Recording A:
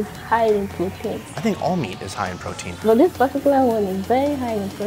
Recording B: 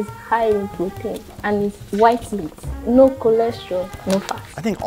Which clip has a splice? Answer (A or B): A